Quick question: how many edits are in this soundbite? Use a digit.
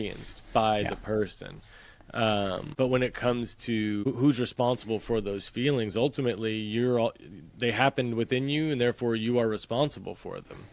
2